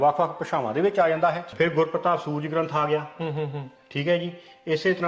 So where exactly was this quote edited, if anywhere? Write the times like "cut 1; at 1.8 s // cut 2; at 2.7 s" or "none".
cut 1; at 1.5 s